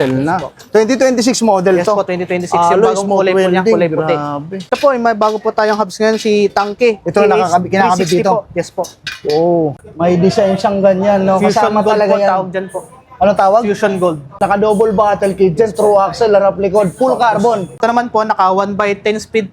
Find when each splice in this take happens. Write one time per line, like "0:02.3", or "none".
0:04.6
0:09.7
0:14.4
0:17.7